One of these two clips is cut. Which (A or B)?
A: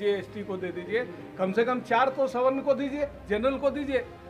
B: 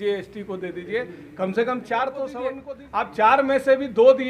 B